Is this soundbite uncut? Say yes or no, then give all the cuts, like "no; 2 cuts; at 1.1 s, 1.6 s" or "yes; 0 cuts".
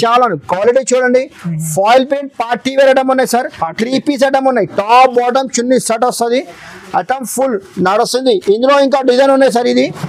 yes; 0 cuts